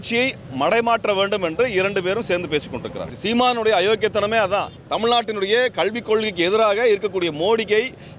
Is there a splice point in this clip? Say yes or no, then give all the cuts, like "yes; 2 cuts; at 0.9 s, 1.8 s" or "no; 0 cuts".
yes; 2 cuts; at 3.1 s, 4.8 s